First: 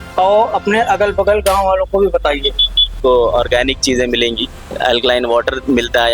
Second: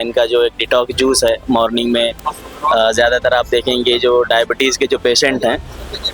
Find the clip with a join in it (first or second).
first